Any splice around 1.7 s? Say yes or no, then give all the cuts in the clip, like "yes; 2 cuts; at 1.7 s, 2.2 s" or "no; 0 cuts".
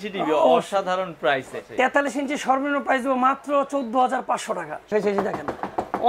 yes; 2 cuts; at 1.7 s, 4.9 s